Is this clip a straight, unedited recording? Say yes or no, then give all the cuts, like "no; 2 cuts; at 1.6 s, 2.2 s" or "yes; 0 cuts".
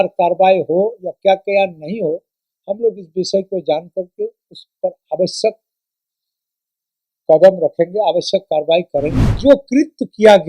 no; 1 cut; at 9.2 s